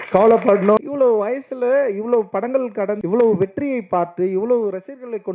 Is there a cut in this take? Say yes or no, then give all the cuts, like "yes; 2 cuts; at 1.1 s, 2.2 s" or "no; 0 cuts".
yes; 2 cuts; at 0.8 s, 3.0 s